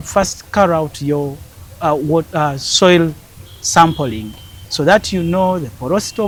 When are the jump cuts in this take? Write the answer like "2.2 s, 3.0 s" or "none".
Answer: none